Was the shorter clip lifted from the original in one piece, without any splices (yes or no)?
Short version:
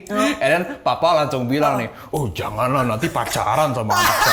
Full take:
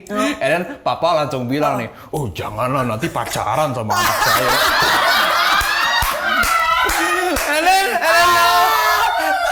yes